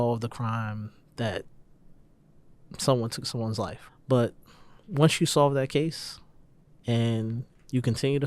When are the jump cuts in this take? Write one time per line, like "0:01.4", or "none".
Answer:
0:03.8